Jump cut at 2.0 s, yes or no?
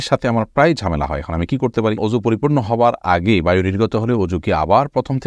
yes